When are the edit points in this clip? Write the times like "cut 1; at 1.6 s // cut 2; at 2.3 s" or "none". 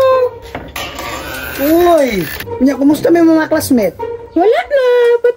cut 1; at 2.4 s